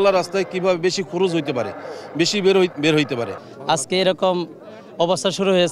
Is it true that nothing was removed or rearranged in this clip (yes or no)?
yes